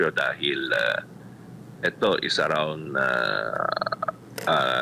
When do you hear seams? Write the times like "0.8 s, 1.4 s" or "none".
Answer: none